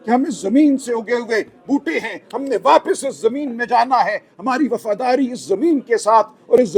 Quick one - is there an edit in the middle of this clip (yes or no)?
no